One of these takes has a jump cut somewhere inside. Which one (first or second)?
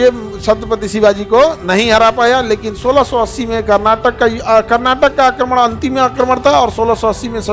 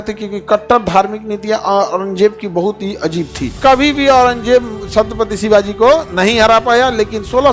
second